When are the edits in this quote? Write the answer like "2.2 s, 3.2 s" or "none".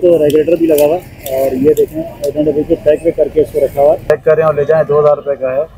4.1 s